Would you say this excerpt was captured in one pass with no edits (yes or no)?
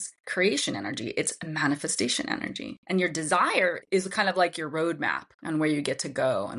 yes